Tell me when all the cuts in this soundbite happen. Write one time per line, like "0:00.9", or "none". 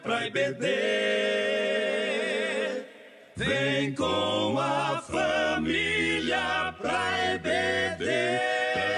none